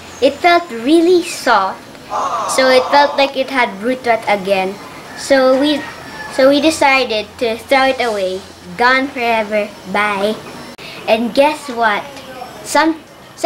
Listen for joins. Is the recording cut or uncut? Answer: cut